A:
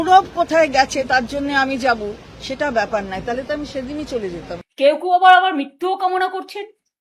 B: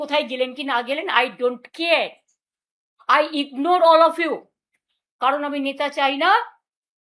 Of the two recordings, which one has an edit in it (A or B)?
A